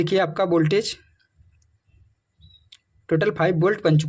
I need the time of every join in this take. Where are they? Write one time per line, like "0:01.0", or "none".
none